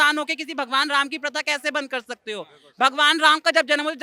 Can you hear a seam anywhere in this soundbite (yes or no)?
no